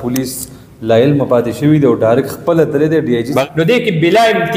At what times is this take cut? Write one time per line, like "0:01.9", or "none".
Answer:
0:03.4